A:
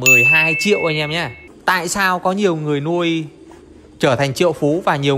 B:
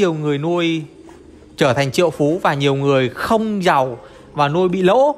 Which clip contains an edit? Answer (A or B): A